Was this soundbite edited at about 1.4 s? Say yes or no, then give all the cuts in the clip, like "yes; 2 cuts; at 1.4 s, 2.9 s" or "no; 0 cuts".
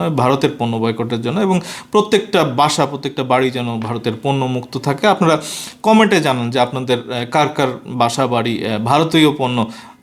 no; 0 cuts